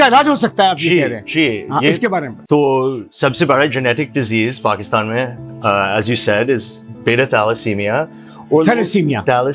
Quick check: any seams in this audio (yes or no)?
no